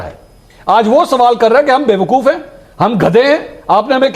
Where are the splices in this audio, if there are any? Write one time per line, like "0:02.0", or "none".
none